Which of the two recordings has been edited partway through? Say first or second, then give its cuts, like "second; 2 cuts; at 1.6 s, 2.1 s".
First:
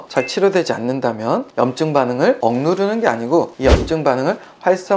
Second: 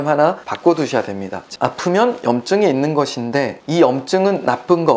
second; 1 cut; at 1.4 s